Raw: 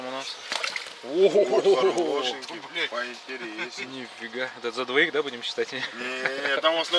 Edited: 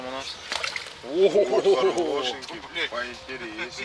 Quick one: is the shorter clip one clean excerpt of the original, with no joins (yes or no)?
yes